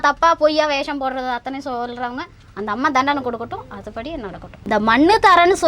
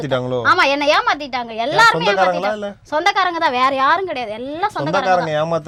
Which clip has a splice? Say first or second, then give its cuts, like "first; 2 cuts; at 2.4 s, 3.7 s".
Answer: first; 1 cut; at 4.6 s